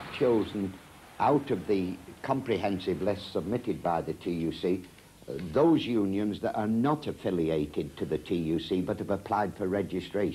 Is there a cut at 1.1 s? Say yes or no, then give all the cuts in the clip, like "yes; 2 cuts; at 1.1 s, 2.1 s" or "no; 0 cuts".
no; 1 cut; at 5.2 s